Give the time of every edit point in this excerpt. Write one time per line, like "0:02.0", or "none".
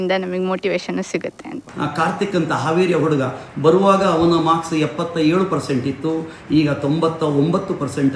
0:01.7